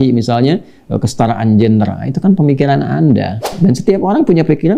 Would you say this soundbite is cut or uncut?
cut